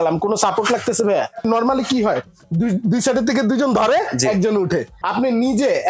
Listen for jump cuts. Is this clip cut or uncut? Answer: cut